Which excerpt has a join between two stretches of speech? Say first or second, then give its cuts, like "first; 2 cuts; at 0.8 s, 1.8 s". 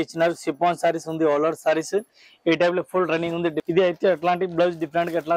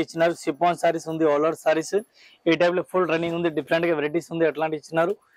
first; 1 cut; at 3.6 s